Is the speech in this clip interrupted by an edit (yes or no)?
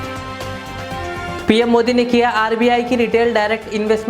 yes